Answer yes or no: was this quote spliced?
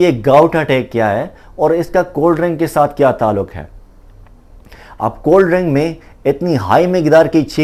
no